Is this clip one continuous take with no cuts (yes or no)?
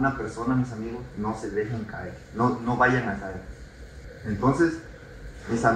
no